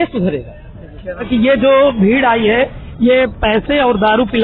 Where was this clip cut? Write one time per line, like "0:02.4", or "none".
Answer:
0:01.2